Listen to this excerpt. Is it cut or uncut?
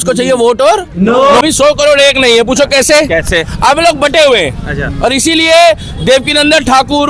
cut